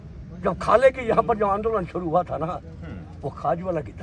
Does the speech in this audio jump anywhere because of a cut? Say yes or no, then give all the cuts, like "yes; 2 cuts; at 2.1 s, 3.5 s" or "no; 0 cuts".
no; 0 cuts